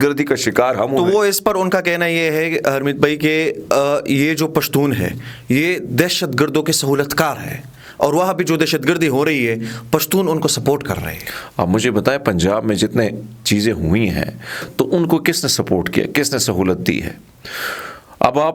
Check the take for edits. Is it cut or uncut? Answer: uncut